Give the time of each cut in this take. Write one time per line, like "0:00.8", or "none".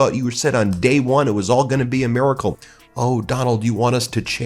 0:02.6